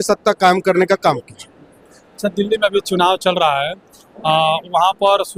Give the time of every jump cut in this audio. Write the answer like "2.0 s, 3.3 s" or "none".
none